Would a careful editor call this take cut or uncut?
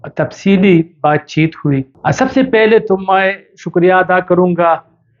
cut